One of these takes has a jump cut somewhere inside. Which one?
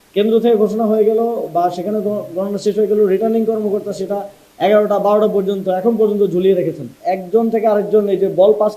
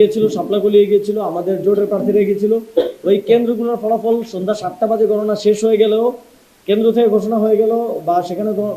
first; 1 cut; at 6.9 s

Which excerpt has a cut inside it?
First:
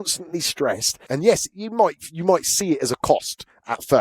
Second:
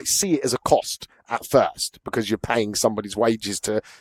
first; 1 cut; at 0.9 s

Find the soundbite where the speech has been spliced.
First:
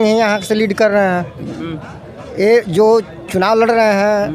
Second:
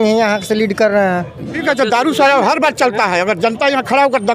second; 1 cut; at 1.6 s

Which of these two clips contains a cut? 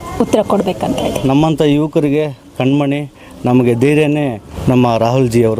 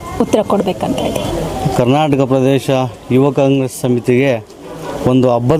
first; 2 cuts; at 1.2 s, 4.5 s

